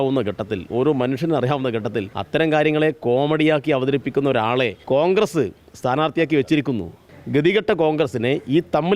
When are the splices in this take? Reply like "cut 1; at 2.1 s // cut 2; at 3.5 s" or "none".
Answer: cut 1; at 2.2 s // cut 2; at 4.8 s // cut 3; at 7.1 s